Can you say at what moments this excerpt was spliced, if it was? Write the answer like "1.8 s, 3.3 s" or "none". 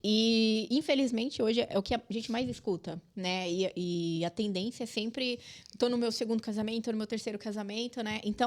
none